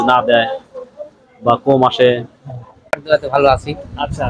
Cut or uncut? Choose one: cut